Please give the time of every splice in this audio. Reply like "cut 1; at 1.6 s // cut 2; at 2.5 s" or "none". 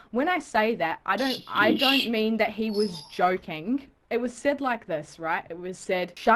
cut 1; at 3.9 s